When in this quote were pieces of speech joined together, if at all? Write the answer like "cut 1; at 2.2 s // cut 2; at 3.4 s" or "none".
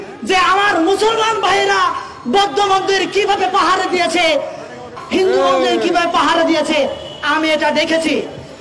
cut 1; at 5.0 s